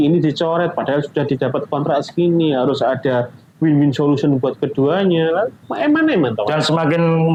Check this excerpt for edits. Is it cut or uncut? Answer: uncut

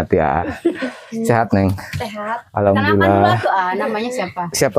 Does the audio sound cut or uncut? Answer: uncut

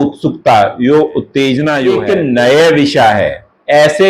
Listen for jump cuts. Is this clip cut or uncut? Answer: cut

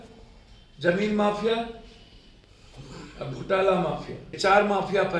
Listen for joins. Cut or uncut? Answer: cut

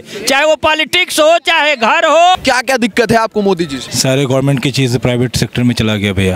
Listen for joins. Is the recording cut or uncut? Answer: cut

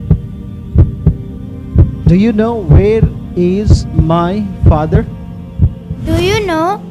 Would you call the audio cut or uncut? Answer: cut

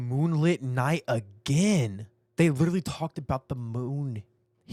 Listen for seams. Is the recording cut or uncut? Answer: uncut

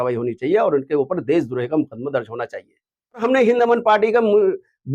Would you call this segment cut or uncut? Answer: cut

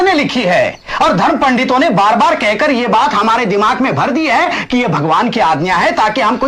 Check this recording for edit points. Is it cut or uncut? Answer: uncut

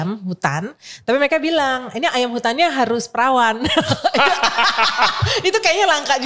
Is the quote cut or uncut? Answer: uncut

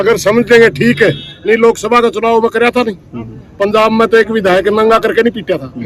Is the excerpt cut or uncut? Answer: uncut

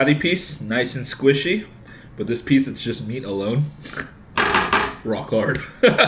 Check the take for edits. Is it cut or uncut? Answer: uncut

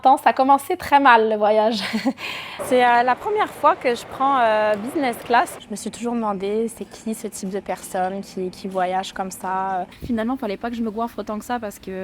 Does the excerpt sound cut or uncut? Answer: cut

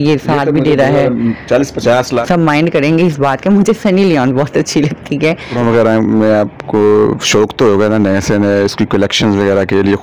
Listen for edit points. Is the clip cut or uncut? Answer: cut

